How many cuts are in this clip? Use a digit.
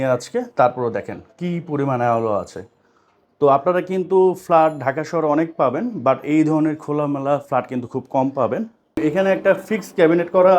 1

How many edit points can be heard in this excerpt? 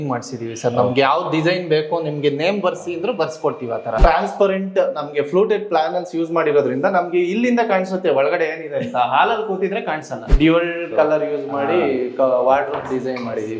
2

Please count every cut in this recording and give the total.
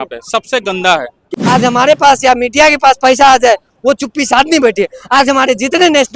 1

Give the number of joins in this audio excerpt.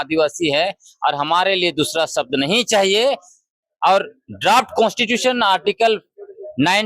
0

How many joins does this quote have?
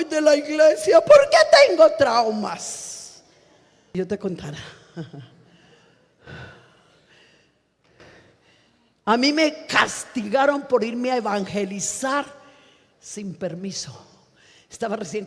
1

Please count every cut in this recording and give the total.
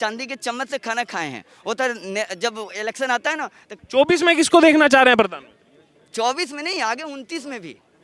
1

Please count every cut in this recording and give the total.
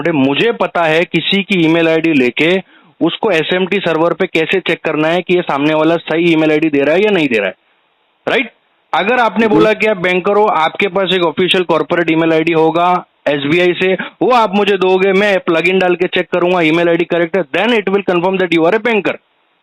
0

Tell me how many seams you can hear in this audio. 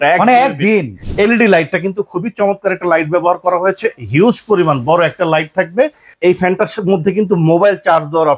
2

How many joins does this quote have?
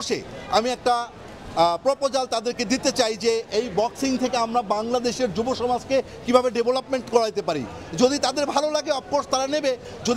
0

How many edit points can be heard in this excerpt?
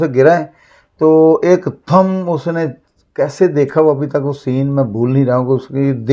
0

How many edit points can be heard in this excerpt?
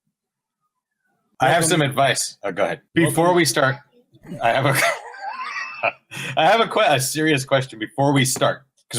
1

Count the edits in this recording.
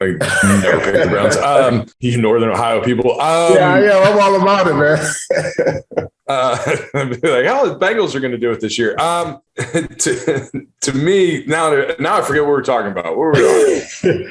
2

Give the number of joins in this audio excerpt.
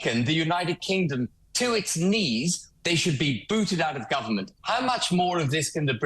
2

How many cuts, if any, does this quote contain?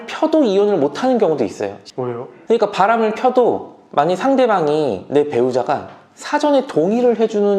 1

